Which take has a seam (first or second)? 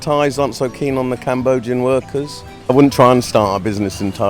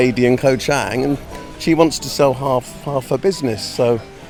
first